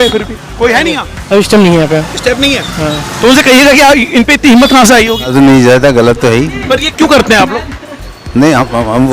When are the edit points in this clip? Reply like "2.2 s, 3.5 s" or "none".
5.3 s